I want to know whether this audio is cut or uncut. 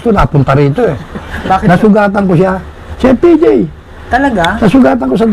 cut